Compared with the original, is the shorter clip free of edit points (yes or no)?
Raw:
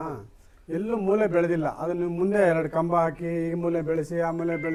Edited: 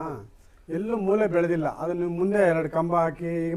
yes